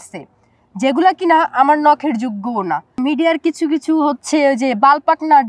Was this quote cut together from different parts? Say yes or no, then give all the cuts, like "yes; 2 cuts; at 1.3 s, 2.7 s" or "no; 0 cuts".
yes; 1 cut; at 2.9 s